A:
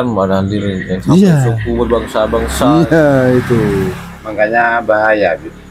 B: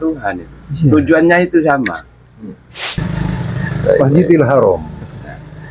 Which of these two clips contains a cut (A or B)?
B